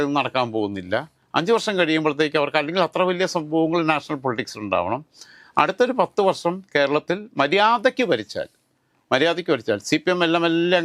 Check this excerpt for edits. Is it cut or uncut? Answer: uncut